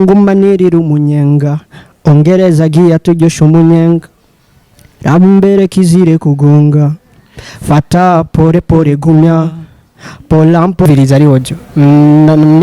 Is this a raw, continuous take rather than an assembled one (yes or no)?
no